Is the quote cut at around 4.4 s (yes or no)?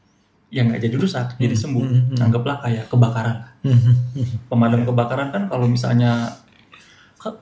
no